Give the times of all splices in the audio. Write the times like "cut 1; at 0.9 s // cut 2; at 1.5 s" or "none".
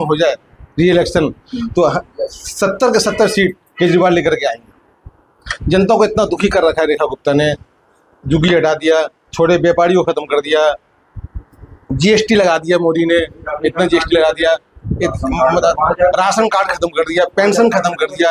none

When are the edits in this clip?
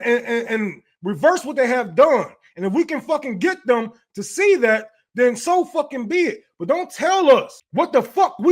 cut 1; at 7.6 s

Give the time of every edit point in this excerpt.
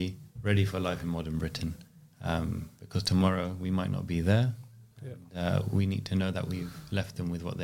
none

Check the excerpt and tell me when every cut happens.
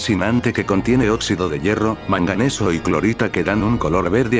cut 1; at 2.4 s

